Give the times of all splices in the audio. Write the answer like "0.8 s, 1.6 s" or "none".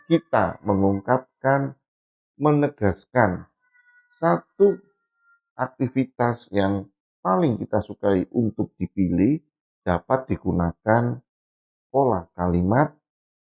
none